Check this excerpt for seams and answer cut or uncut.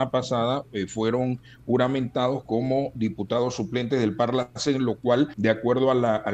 cut